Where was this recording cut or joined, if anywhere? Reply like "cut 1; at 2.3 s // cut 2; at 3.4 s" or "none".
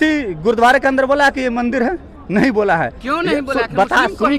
none